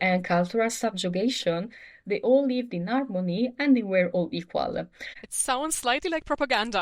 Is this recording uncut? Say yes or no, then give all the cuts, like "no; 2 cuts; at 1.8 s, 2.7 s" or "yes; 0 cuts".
no; 1 cut; at 5.1 s